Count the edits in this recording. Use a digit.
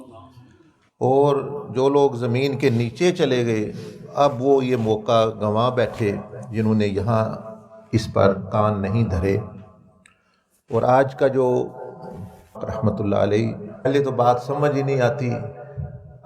2